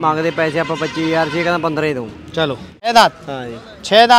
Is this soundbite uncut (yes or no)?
no